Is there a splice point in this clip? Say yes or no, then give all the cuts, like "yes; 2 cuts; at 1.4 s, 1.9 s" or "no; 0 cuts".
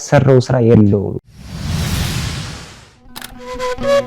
yes; 1 cut; at 1.2 s